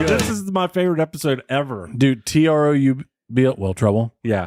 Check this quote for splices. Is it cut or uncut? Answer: uncut